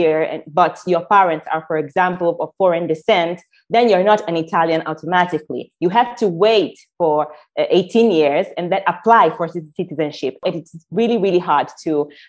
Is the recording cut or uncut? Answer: cut